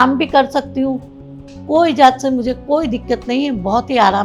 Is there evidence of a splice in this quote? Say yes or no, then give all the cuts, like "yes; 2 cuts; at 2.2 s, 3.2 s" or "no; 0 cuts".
no; 0 cuts